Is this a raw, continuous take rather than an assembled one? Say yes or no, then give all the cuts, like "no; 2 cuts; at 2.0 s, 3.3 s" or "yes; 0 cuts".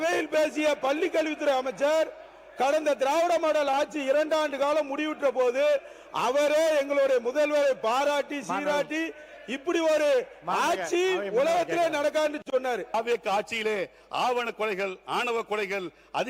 yes; 0 cuts